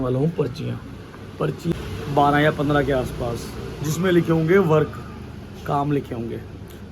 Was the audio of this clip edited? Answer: yes; 1 cut; at 1.7 s

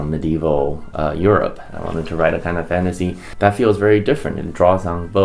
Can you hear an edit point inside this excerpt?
yes; 2 cuts; at 1.7 s, 3.2 s

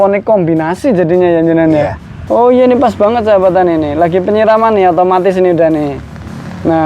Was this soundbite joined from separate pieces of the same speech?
yes; 1 cut; at 2.1 s

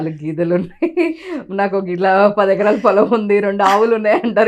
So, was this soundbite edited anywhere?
no; 0 cuts

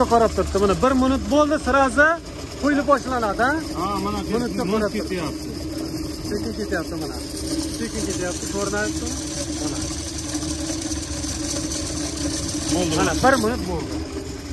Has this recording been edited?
no; 0 cuts

